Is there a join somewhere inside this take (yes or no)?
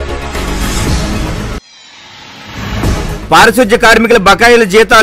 yes